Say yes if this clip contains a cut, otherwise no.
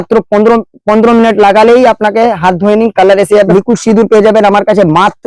yes